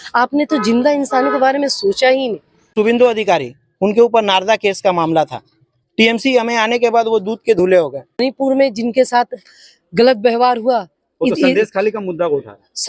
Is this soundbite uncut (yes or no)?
no